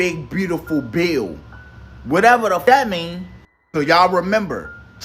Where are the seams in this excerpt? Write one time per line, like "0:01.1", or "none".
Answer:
0:02.6